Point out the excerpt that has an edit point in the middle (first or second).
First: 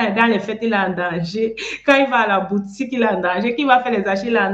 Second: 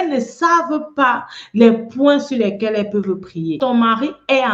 second